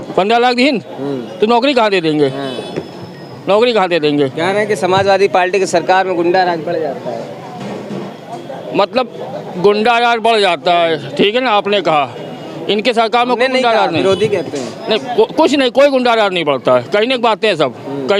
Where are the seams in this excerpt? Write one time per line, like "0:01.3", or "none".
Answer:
none